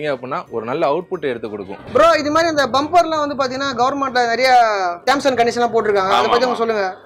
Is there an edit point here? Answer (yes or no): no